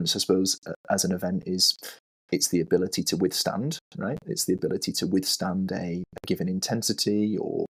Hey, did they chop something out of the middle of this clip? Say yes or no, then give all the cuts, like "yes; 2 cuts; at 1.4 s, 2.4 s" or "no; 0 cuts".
no; 0 cuts